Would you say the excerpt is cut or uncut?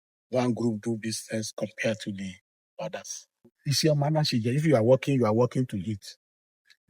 cut